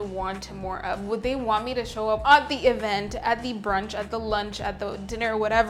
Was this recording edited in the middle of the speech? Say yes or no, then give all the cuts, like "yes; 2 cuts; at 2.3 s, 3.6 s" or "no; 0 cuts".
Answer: no; 0 cuts